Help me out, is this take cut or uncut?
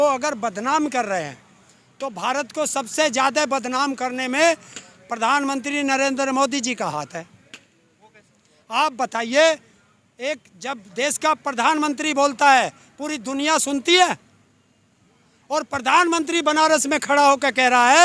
uncut